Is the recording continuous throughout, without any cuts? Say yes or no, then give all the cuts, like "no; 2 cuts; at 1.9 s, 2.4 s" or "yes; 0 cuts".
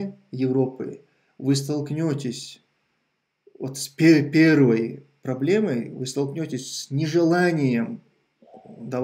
yes; 0 cuts